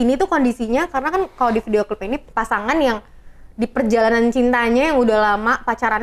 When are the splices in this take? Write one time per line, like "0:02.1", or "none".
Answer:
0:02.3